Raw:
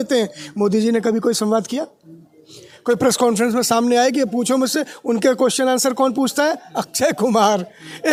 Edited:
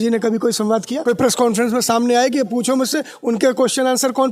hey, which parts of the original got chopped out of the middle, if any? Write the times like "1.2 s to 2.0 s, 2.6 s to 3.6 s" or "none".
1.8 s to 2.8 s